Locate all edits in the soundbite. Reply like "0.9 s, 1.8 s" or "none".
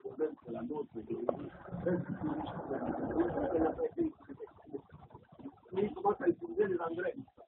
none